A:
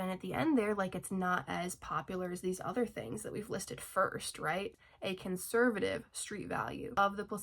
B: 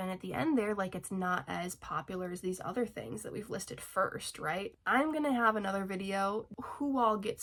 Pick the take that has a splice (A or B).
A